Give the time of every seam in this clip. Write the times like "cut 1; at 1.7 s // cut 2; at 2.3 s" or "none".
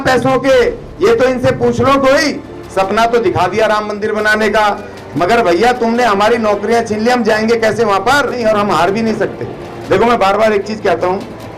cut 1; at 8.4 s